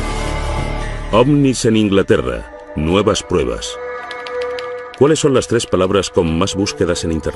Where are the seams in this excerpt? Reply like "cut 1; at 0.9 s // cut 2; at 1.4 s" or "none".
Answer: cut 1; at 4.5 s